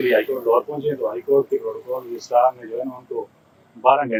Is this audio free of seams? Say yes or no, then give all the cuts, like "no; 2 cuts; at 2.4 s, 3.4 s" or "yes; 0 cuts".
yes; 0 cuts